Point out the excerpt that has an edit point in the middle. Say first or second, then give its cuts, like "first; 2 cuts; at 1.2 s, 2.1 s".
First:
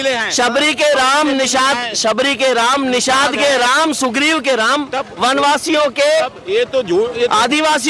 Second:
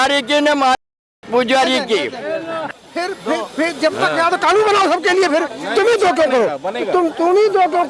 second; 1 cut; at 2.7 s